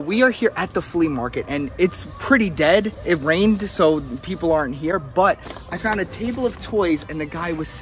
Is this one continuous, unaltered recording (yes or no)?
yes